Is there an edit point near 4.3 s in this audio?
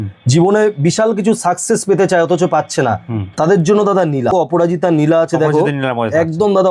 yes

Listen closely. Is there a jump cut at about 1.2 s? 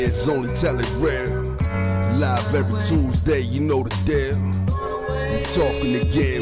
no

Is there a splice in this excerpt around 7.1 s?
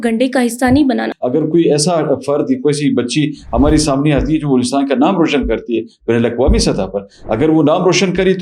no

